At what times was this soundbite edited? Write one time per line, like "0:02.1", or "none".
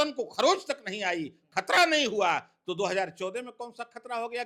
none